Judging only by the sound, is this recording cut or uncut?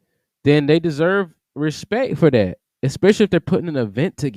uncut